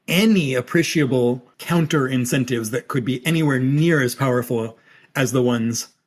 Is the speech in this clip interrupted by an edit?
yes; 1 cut; at 1.5 s

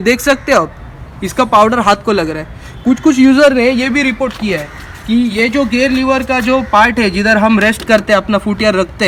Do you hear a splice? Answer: no; 0 cuts

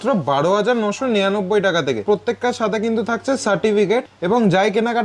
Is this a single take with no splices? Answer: no; 2 cuts; at 2.0 s, 4.1 s

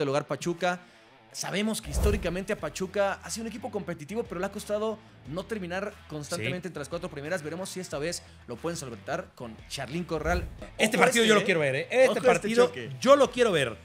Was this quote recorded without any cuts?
no; 1 cut; at 10.5 s

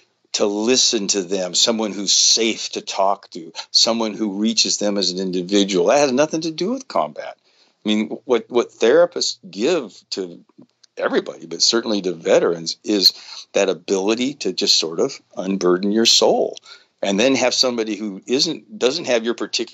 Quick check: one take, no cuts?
yes; 0 cuts

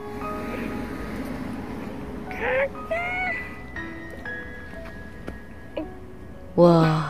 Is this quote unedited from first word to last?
yes; 0 cuts

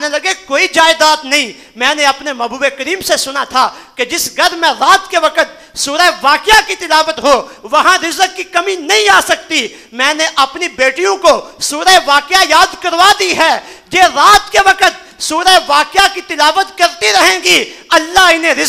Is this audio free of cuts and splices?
yes; 0 cuts

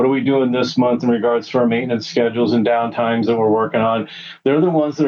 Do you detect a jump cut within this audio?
no; 0 cuts

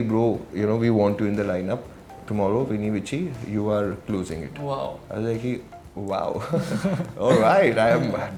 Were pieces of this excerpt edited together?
no; 0 cuts

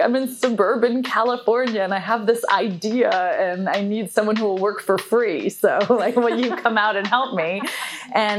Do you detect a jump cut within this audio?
no; 0 cuts

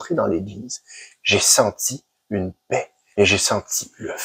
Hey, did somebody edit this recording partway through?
yes; 1 cut; at 3.0 s

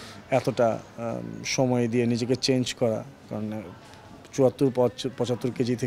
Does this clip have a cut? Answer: no; 0 cuts

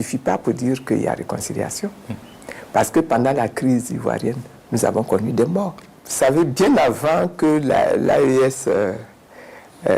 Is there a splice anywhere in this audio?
yes; 1 cut; at 6.0 s

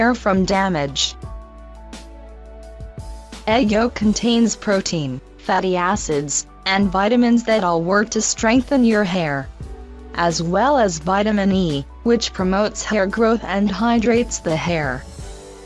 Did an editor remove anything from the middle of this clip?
no; 0 cuts

